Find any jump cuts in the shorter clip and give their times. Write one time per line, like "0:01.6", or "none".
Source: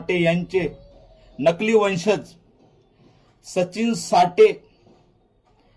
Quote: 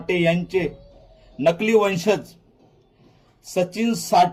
none